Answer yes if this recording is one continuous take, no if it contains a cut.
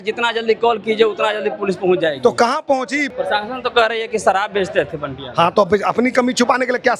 no